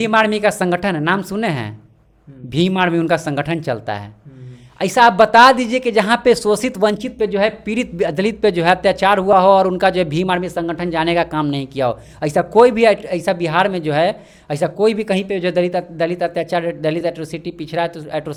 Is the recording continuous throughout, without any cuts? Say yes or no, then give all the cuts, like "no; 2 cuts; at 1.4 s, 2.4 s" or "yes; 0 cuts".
yes; 0 cuts